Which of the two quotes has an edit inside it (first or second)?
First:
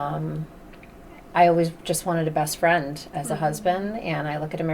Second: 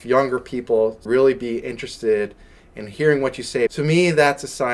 second